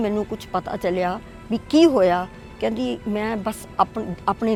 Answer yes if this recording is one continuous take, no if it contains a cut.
yes